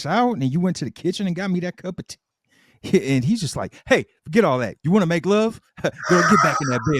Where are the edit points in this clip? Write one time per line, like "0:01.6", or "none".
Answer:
none